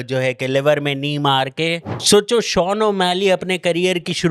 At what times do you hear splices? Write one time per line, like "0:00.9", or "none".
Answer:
0:01.9